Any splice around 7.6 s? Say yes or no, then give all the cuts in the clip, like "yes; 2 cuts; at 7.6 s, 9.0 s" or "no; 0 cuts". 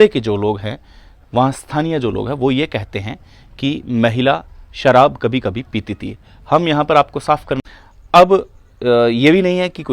yes; 1 cut; at 7.6 s